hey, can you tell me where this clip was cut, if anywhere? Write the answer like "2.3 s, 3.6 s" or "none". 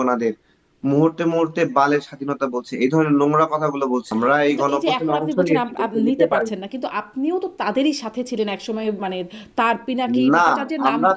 4.1 s